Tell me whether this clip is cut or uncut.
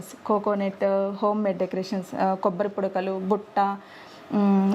uncut